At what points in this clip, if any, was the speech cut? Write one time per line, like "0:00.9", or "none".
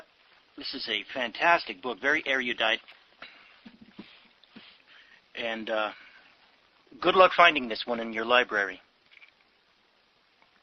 0:09.1